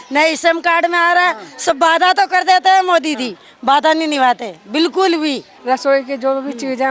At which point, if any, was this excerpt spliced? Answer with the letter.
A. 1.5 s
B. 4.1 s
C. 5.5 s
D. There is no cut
C